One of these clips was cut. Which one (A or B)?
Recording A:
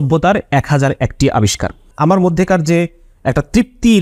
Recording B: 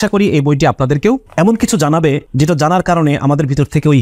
B